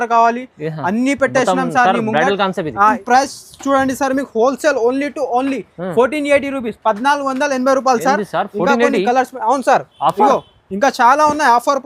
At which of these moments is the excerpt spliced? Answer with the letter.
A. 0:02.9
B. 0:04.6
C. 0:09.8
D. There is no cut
A